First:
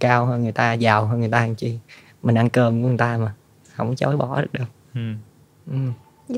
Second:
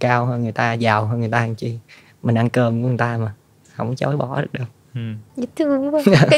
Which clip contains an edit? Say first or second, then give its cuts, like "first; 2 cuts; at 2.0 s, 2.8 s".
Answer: second; 1 cut; at 5.2 s